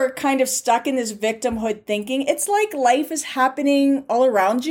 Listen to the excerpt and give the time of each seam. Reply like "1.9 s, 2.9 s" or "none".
none